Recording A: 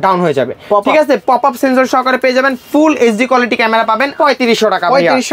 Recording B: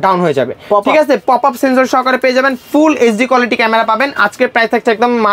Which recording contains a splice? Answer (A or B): A